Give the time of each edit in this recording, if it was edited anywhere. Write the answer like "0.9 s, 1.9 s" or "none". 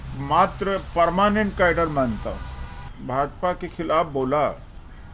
2.9 s